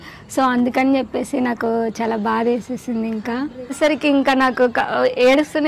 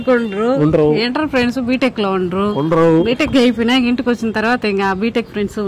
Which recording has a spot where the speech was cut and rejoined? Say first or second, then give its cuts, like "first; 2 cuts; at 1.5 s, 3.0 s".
first; 1 cut; at 3.8 s